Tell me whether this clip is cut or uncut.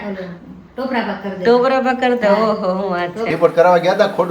cut